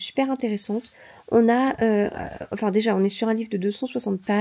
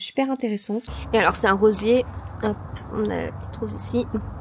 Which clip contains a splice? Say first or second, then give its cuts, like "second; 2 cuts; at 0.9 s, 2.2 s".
second; 1 cut; at 0.9 s